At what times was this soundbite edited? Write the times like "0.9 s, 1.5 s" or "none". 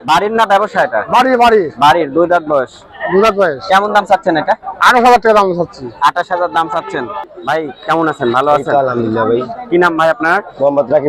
7.2 s